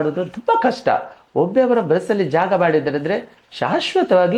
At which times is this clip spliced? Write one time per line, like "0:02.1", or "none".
none